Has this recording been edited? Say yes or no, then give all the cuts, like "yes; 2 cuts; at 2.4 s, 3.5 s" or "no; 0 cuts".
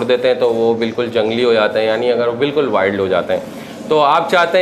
no; 0 cuts